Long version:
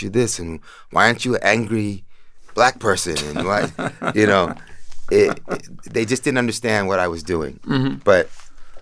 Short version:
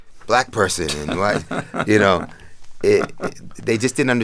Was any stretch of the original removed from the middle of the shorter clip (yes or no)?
no